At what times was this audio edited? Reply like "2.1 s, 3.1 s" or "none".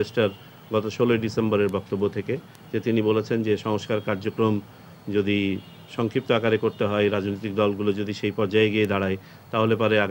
none